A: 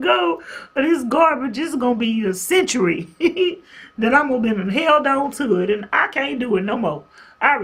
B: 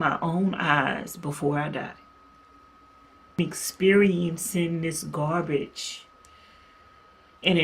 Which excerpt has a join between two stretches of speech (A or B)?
B